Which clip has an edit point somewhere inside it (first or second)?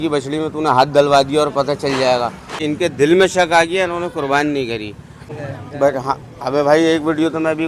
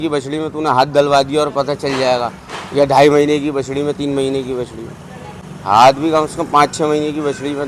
first